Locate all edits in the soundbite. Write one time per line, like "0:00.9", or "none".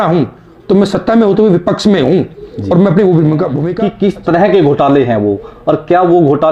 0:03.6